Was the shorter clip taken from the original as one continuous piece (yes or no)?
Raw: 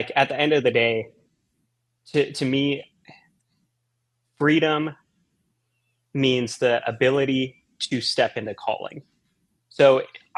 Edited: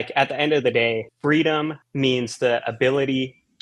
no